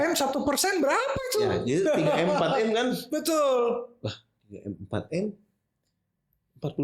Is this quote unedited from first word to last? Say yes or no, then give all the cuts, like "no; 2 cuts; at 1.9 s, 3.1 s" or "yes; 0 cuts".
yes; 0 cuts